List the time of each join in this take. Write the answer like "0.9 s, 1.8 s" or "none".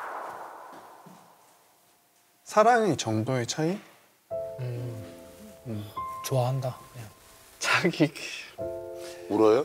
none